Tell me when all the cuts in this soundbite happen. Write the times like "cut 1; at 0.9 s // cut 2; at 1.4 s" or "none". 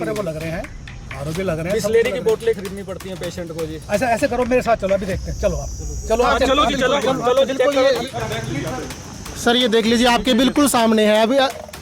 cut 1; at 8.1 s